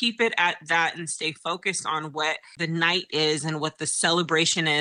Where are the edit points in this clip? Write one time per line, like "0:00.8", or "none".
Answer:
0:02.5